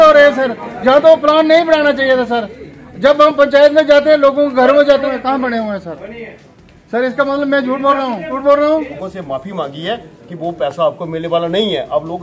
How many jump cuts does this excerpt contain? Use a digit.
3